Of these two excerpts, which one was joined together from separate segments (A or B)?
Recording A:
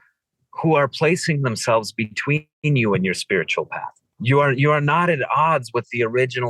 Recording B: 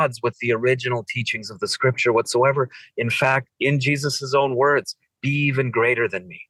A